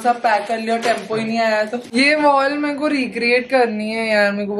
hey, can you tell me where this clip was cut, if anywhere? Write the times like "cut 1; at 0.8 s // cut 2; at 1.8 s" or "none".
cut 1; at 1.9 s

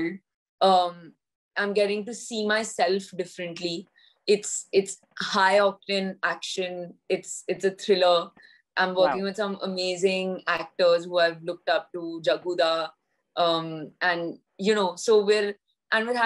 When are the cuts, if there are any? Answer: none

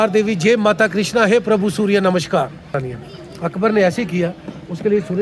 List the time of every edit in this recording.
cut 1; at 2.8 s

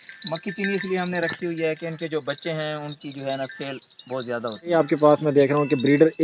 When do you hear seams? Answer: cut 1; at 4.7 s

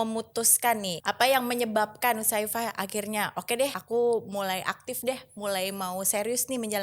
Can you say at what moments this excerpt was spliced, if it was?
cut 1; at 0.9 s // cut 2; at 3.8 s

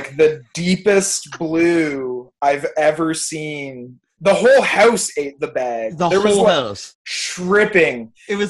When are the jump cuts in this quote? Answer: cut 1; at 4.0 s // cut 2; at 6.8 s

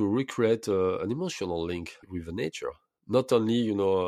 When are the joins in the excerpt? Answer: cut 1; at 2.1 s

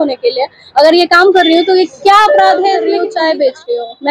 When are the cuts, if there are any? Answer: cut 1; at 3.0 s

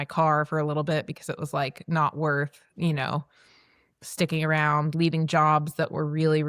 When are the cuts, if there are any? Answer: none

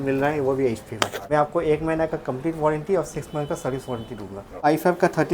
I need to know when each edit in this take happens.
cut 1; at 1.2 s // cut 2; at 4.6 s

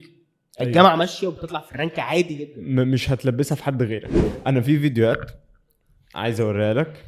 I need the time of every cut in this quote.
cut 1; at 4.2 s

